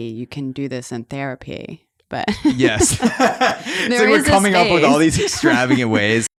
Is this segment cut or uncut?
uncut